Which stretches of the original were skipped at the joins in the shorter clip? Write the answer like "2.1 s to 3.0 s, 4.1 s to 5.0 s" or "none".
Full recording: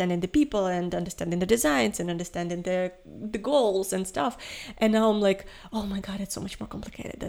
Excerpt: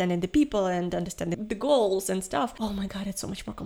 1.3 s to 3.2 s, 4.4 s to 5.7 s